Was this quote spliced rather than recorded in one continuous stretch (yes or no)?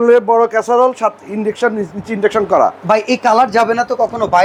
no